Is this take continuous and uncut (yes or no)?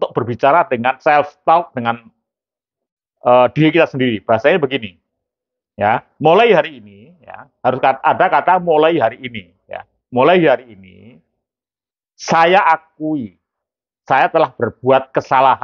yes